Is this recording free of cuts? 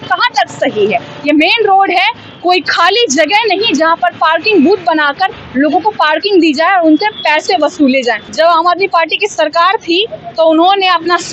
no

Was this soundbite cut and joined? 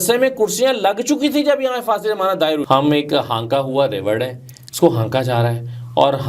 yes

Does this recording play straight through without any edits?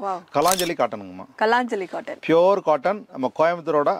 yes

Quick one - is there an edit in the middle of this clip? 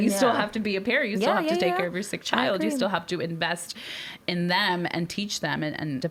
no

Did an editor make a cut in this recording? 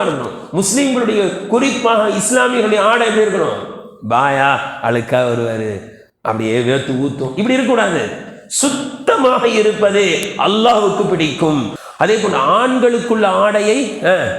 yes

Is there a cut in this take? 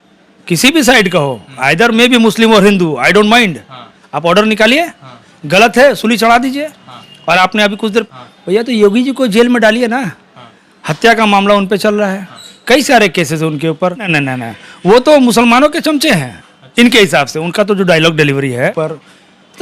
yes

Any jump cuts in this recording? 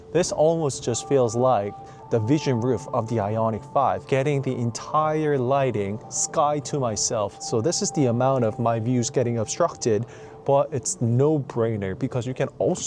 no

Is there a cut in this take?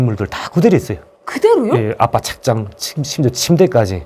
no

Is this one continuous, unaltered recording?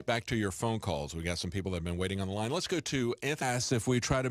yes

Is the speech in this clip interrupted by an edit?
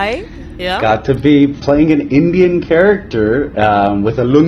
no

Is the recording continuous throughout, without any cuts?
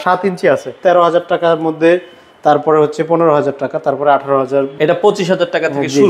no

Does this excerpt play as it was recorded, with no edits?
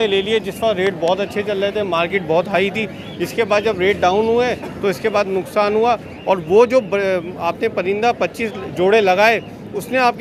yes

